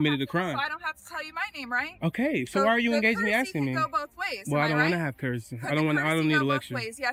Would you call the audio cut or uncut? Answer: uncut